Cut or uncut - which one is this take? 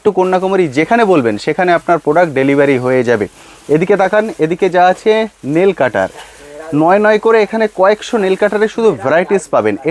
uncut